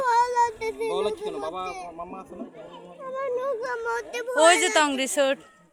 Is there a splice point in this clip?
no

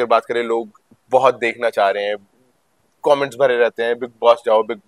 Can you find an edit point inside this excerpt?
no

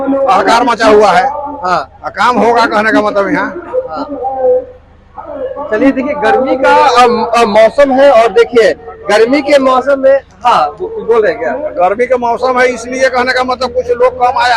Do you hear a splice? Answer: no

